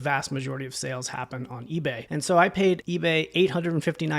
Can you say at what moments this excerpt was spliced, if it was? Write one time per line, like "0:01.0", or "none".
0:02.0
0:02.9